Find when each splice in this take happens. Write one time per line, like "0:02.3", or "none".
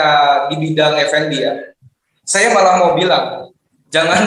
none